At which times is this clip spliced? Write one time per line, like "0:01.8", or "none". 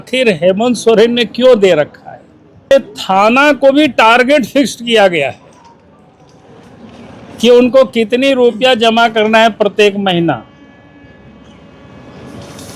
0:02.7